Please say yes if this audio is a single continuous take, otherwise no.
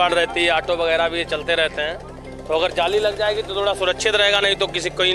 yes